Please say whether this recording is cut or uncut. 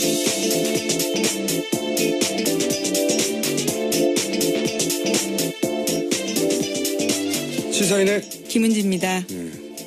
cut